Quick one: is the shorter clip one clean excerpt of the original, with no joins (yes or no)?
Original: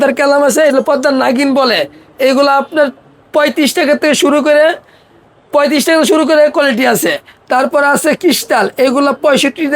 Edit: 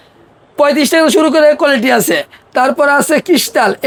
yes